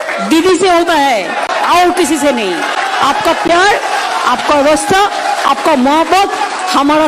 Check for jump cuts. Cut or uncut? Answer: uncut